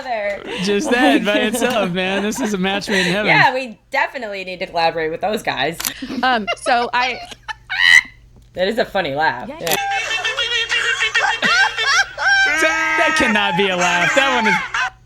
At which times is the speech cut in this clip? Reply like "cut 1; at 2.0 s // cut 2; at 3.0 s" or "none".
cut 1; at 5.9 s // cut 2; at 9.8 s

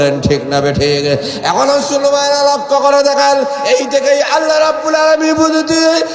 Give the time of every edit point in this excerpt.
none

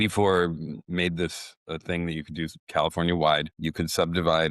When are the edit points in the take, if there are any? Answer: cut 1; at 3.6 s

